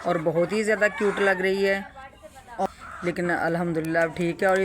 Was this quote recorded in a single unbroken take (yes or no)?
no